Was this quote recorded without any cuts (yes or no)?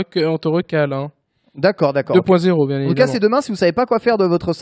yes